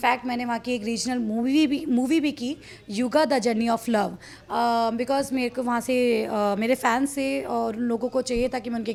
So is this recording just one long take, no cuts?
yes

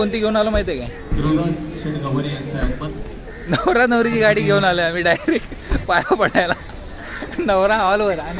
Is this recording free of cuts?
yes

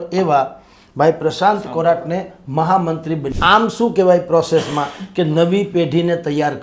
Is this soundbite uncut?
no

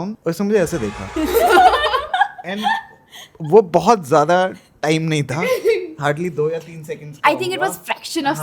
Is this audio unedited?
yes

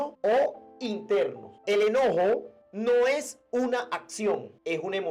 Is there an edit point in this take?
no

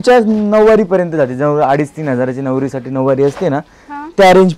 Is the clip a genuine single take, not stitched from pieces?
yes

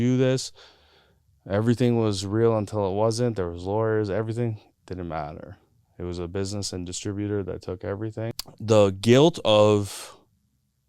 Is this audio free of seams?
no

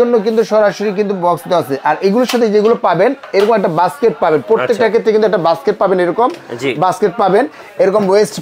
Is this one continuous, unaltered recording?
yes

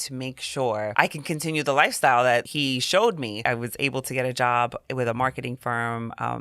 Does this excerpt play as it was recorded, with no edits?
no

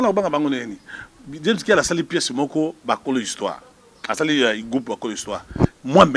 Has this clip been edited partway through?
no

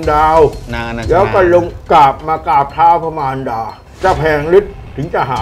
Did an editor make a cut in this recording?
no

